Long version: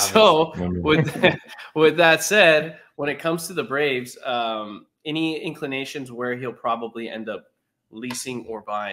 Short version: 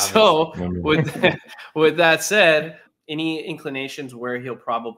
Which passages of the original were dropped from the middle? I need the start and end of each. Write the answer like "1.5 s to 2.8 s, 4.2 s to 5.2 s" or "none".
2.8 s to 4.8 s